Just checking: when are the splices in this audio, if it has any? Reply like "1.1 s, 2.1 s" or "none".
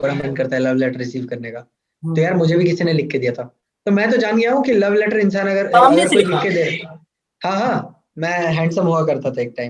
none